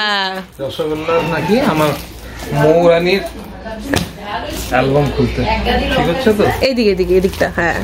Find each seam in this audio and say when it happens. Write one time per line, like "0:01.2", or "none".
none